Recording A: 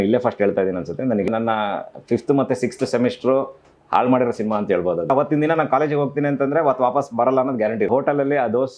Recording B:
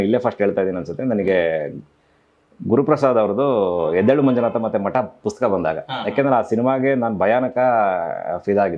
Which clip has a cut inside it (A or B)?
A